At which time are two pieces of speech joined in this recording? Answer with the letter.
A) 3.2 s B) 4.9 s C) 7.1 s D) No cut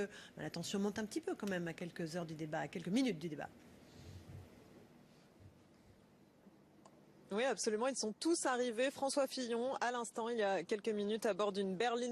B